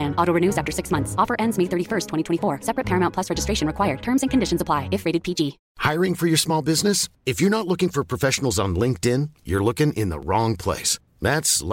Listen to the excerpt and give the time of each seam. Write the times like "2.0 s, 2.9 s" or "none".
5.6 s